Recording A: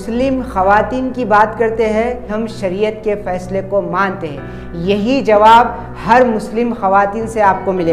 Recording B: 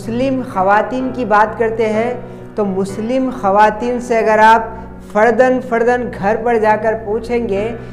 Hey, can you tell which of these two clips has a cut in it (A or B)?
A